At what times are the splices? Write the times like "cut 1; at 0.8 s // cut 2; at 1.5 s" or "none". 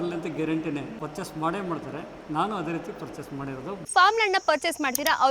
cut 1; at 1.0 s // cut 2; at 3.9 s